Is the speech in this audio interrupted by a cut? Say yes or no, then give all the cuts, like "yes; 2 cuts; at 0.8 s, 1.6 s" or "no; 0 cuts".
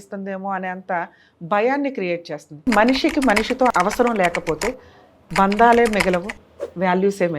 yes; 2 cuts; at 2.7 s, 3.7 s